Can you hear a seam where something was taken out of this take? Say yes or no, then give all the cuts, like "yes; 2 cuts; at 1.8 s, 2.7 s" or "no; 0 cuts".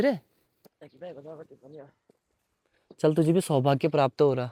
no; 0 cuts